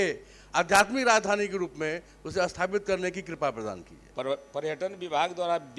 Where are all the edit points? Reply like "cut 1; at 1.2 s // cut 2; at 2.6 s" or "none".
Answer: cut 1; at 4.0 s